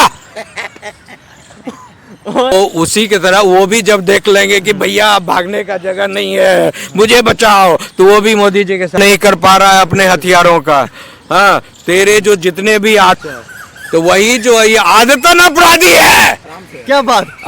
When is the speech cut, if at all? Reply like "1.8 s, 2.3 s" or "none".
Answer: 2.5 s, 9.0 s, 13.1 s

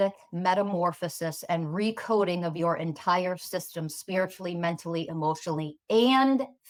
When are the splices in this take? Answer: none

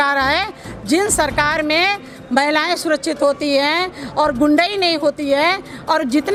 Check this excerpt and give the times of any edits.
none

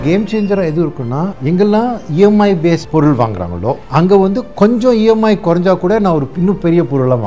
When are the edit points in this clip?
1.3 s

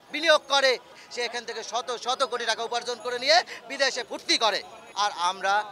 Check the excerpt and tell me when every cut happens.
1.0 s, 4.8 s

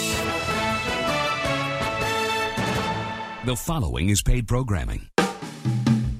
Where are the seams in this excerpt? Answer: 3.3 s, 5.0 s

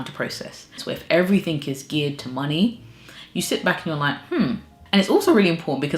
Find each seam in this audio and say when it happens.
0.8 s, 4.7 s

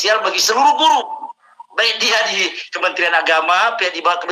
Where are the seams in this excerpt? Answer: none

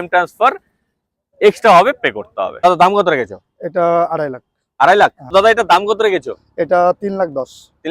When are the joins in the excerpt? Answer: 2.6 s, 5.3 s

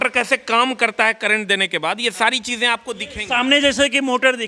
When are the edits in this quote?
none

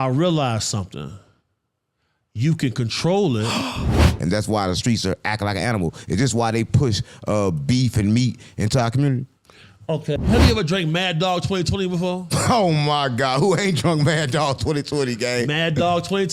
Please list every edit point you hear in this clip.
4.1 s, 10.2 s

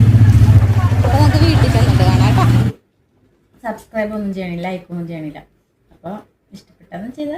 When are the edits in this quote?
2.6 s

